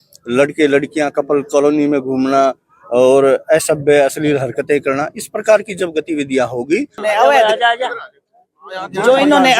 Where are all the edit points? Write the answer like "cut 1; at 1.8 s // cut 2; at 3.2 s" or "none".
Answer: cut 1; at 7.0 s